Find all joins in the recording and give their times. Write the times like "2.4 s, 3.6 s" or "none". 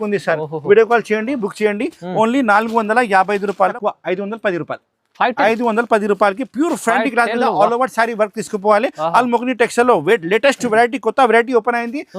3.8 s